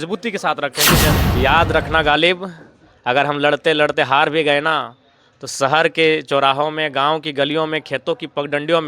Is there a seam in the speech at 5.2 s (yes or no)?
no